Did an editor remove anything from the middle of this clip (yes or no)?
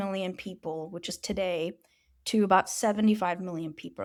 no